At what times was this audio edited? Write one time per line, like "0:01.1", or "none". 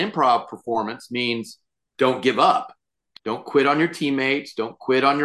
0:03.1